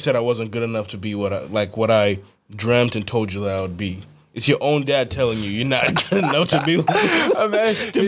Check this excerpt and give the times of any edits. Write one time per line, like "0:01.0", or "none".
none